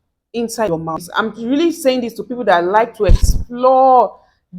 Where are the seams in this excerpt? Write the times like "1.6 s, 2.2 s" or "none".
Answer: 1.1 s

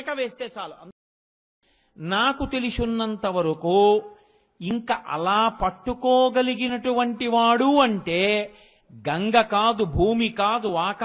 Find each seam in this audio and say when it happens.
1.3 s

